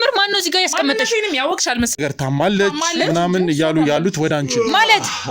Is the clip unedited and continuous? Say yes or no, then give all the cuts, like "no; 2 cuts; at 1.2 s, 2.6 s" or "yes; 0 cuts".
no; 1 cut; at 2.0 s